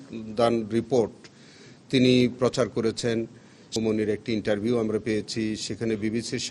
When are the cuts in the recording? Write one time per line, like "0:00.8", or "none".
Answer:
0:03.7